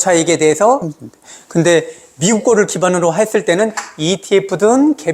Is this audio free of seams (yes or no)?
no